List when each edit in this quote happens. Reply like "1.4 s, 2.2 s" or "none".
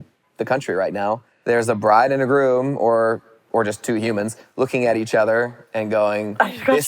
1.3 s